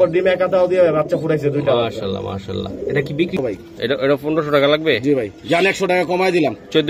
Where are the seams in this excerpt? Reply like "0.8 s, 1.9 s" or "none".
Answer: 3.4 s